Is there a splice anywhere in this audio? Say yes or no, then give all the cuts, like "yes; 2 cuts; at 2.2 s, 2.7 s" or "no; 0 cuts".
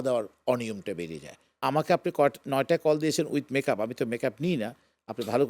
yes; 1 cut; at 1.5 s